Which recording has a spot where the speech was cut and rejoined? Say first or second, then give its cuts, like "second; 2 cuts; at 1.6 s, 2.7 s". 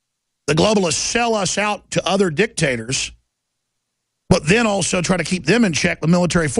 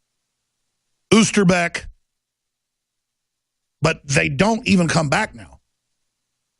second; 1 cut; at 3.2 s